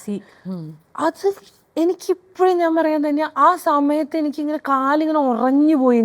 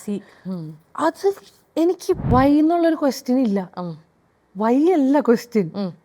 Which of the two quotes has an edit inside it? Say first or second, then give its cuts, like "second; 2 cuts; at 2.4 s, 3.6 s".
second; 1 cut; at 2.2 s